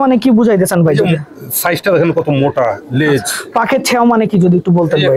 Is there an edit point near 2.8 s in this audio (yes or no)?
yes